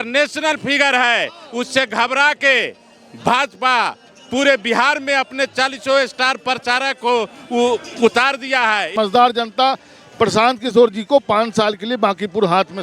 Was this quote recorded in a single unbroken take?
no; 1 cut; at 9.2 s

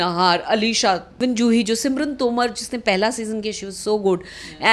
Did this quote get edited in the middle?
yes; 1 cut; at 1.1 s

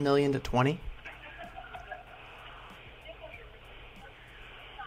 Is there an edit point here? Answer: no; 0 cuts

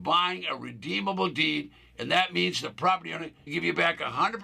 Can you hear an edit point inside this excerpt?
yes; 1 cut; at 3.4 s

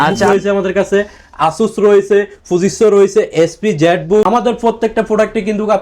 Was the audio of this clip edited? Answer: yes; 1 cut; at 4.2 s

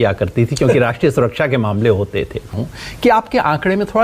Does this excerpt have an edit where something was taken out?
yes; 1 cut; at 2.5 s

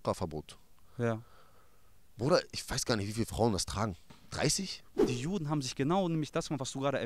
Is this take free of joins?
no; 1 cut; at 4.9 s

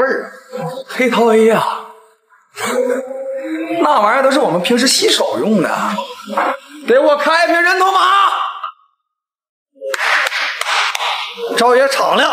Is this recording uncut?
yes; 0 cuts

